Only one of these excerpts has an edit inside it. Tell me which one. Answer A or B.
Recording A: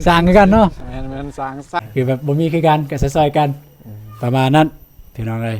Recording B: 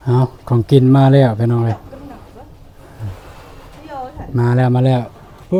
A